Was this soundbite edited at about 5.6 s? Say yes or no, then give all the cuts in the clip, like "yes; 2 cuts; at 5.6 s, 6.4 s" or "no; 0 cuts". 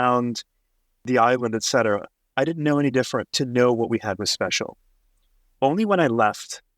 no; 1 cut; at 1.0 s